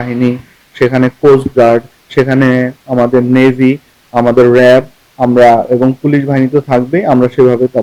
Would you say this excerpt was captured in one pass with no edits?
yes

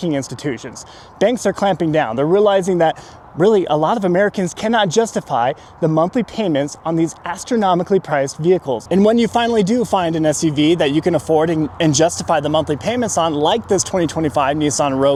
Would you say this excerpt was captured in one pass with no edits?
yes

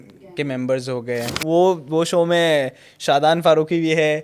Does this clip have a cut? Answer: yes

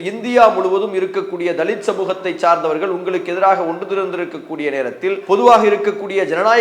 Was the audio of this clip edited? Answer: yes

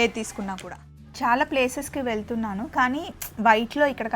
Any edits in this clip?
yes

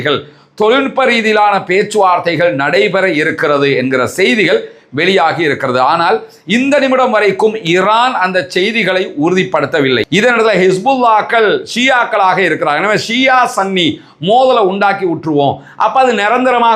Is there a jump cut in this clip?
yes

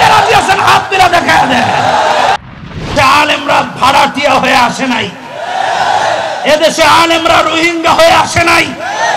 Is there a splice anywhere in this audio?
yes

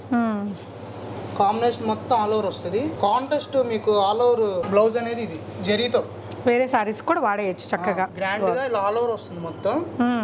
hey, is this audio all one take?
no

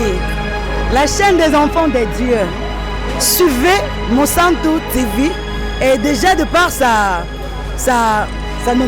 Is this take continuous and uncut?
yes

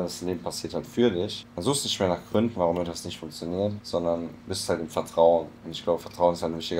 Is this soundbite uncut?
no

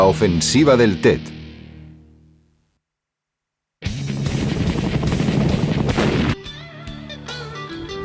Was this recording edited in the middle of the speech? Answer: no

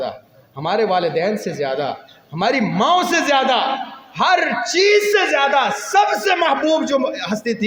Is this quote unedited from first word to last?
yes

